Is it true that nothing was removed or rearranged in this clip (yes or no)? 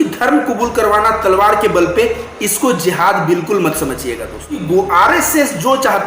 no